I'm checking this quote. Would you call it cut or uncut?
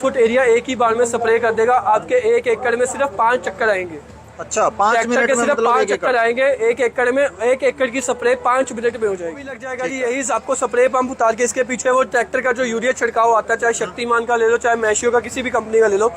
cut